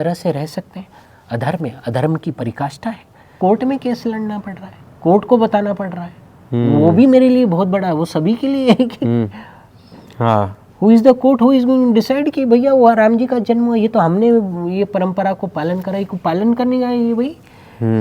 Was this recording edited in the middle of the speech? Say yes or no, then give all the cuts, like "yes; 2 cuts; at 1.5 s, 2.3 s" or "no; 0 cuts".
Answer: yes; 1 cut; at 3.4 s